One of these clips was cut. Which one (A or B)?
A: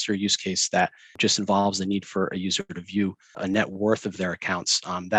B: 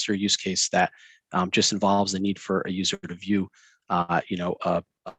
A